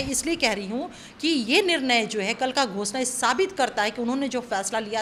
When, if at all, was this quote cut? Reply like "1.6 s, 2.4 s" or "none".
none